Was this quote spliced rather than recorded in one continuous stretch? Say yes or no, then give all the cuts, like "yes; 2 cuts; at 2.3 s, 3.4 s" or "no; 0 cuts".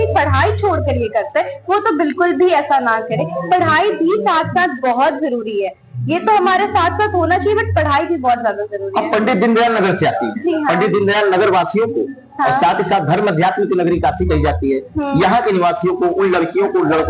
no; 0 cuts